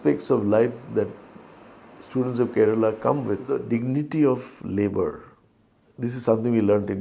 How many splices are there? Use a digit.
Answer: 1